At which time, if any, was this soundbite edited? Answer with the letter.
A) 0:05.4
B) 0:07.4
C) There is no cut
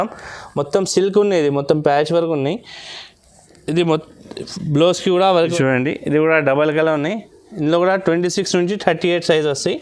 A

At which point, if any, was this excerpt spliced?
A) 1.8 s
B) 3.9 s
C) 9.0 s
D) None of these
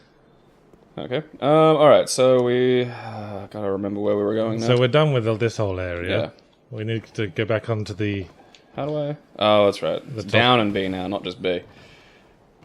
C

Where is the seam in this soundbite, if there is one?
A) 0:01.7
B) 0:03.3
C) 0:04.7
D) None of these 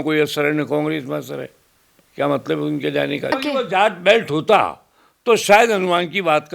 B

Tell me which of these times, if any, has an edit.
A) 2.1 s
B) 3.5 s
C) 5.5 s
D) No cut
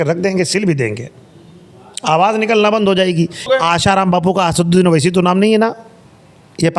B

